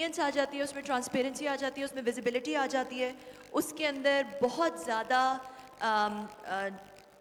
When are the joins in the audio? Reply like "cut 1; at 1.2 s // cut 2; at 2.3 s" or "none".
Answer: none